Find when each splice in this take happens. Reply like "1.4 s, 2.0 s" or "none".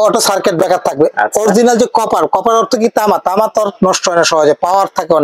none